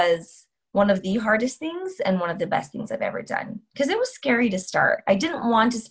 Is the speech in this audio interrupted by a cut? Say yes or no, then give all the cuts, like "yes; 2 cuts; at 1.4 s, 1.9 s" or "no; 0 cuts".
no; 0 cuts